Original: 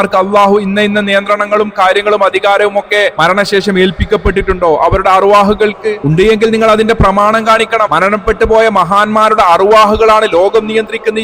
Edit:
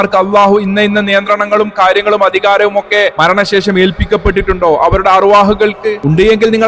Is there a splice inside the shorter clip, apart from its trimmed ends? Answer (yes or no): no